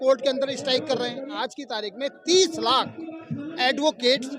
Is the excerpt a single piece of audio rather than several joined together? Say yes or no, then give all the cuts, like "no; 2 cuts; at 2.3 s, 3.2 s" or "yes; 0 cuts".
no; 1 cut; at 1.4 s